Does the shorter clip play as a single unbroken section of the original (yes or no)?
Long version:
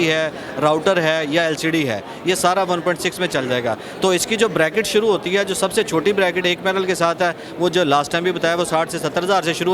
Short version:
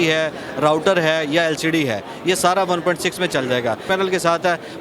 no